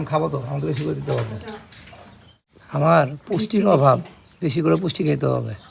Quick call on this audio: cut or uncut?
uncut